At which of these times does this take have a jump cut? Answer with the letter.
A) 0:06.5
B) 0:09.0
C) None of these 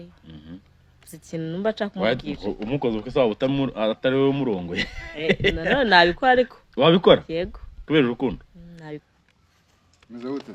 B